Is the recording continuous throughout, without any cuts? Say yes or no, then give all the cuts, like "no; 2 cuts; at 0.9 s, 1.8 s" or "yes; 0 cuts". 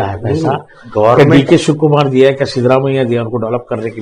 yes; 0 cuts